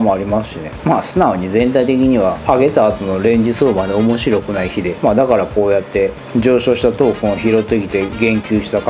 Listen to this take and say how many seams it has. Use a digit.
2